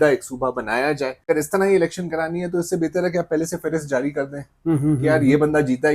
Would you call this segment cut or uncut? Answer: cut